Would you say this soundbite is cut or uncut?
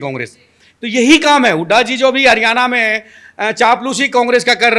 uncut